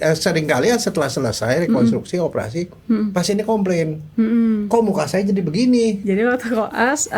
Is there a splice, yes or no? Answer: yes